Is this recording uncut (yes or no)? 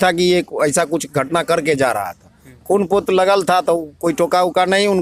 yes